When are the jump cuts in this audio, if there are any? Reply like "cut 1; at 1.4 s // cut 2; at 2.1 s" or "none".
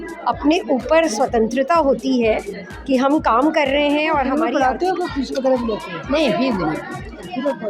cut 1; at 4.4 s